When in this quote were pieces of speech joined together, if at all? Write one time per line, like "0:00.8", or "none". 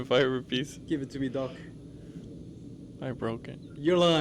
none